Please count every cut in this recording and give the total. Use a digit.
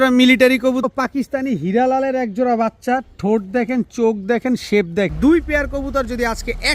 2